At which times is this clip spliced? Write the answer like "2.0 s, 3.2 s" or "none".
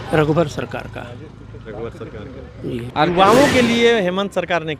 2.9 s